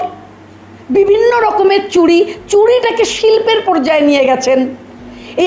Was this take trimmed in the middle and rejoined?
no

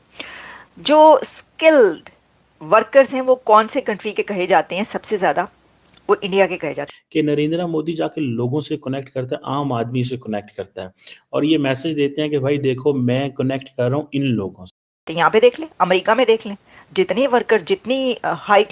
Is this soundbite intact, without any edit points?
no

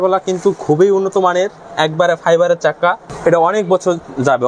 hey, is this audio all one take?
yes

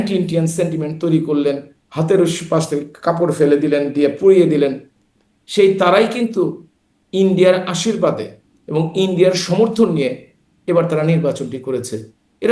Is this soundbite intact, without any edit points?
yes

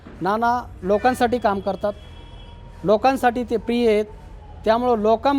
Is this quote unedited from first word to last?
yes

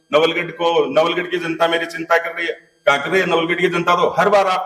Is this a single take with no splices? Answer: yes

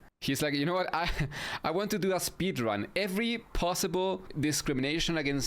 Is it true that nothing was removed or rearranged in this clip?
no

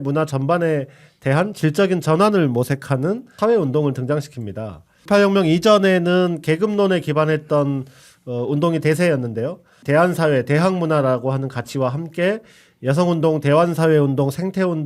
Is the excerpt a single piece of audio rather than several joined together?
no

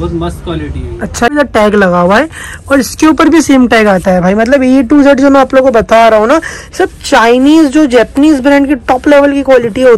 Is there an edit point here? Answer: yes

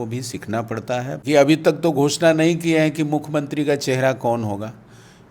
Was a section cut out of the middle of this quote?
yes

